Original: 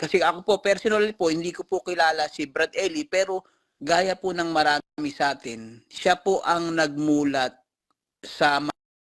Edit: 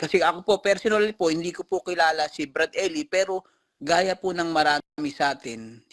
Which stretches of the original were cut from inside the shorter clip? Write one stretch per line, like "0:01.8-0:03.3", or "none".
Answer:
none

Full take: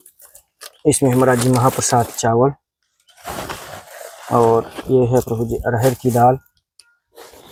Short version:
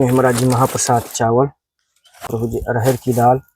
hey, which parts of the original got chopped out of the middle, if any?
0:03.3-0:05.3

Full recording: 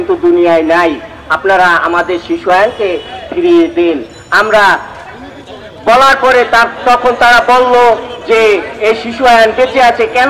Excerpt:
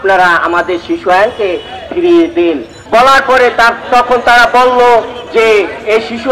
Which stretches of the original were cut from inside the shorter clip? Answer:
0:04.1-0:05.7

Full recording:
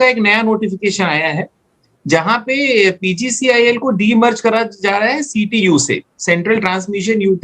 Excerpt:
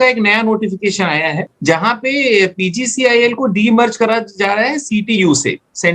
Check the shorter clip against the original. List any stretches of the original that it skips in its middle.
0:01.5-0:01.9

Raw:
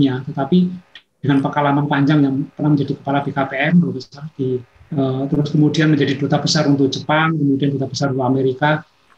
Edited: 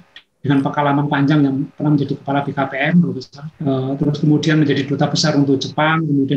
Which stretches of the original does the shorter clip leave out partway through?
0:04.2-0:04.7

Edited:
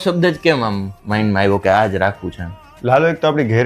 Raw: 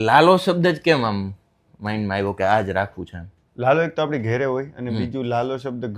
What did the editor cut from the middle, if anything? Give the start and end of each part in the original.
0:01.3-0:01.7

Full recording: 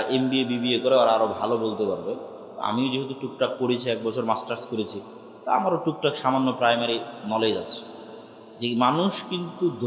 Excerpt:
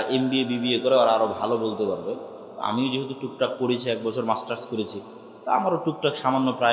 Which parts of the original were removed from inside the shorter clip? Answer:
none

